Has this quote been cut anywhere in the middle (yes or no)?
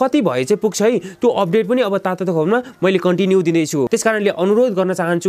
yes